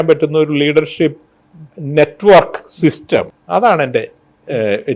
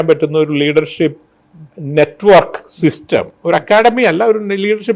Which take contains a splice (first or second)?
first